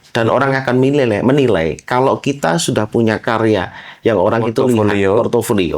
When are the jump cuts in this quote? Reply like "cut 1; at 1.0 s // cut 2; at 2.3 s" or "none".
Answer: none